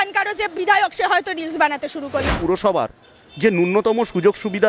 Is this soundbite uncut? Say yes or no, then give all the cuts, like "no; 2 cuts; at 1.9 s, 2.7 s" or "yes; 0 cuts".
no; 1 cut; at 2.4 s